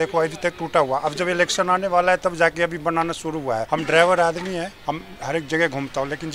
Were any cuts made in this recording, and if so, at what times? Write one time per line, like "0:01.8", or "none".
0:03.7
0:04.7